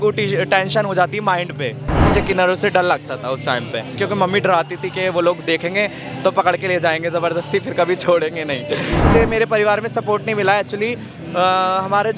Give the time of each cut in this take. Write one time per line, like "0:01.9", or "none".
0:02.1
0:04.0
0:09.0